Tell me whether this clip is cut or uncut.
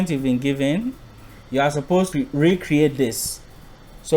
uncut